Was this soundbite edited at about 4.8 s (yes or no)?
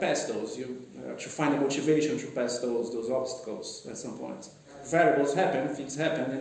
yes